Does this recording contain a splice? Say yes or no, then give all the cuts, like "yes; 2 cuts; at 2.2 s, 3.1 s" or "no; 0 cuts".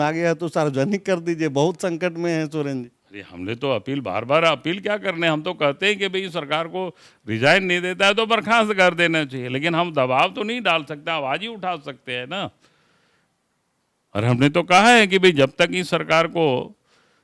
no; 0 cuts